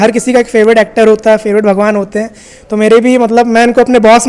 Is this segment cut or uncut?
uncut